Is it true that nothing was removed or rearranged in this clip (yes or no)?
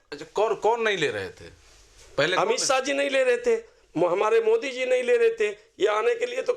yes